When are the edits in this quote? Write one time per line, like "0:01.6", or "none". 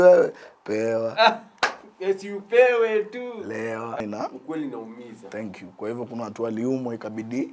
0:04.0